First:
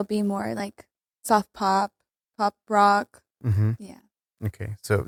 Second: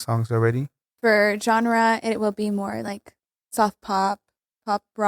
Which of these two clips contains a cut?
second; 1 cut; at 1.0 s

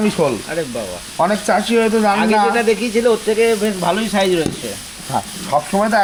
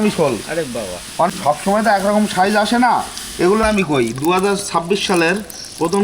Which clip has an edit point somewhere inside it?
second; 2 cuts; at 1.3 s, 3.6 s

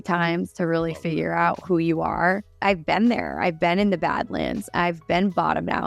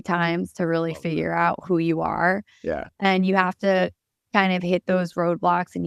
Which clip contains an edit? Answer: first; 1 cut; at 2.5 s

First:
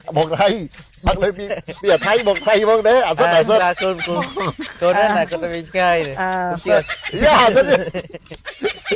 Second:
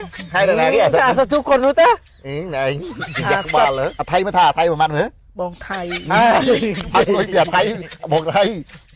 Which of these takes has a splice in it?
second; 1 cut; at 4.0 s

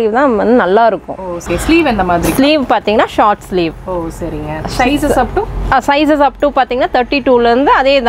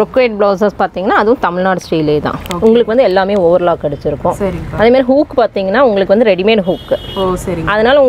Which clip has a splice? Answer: first; 1 cut; at 1.4 s

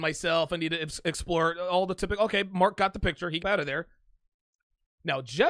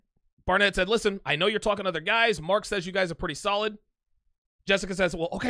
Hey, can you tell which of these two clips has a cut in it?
first; 1 cut; at 3.4 s

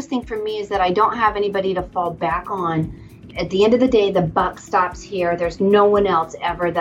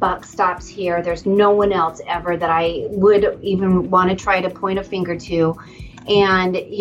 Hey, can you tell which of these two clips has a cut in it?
first; 1 cut; at 3.3 s

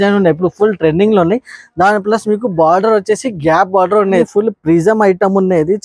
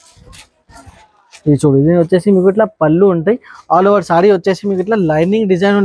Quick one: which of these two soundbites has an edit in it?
first; 1 cut; at 4.3 s

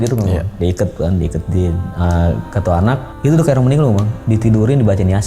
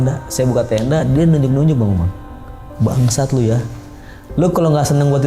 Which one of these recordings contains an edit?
first; 1 cut; at 3.1 s

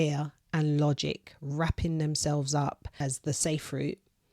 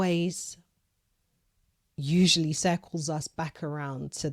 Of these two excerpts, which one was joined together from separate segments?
first; 1 cut; at 3.0 s

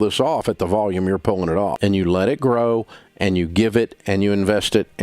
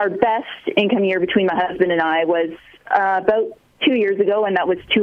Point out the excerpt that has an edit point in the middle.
first; 1 cut; at 1.7 s

